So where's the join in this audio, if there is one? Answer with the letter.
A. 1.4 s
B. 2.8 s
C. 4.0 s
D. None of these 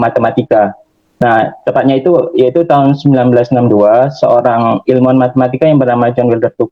D